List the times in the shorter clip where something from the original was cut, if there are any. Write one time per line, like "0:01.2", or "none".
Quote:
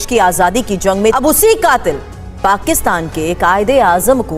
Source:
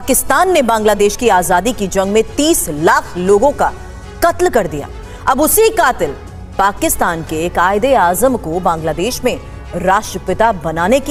0:01.2